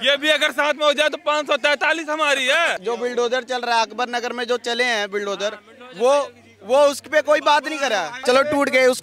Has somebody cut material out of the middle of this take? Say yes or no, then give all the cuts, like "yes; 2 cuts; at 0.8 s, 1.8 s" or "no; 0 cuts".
yes; 2 cuts; at 2.8 s, 8.1 s